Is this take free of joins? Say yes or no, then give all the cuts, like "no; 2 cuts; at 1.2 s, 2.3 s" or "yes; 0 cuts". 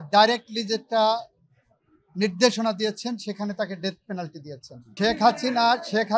no; 1 cut; at 4.8 s